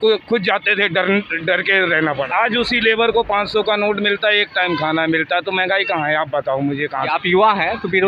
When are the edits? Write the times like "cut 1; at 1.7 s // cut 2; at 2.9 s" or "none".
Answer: cut 1; at 2.3 s // cut 2; at 7.0 s